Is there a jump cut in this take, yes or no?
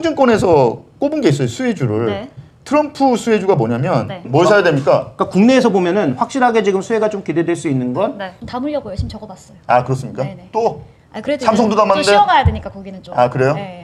yes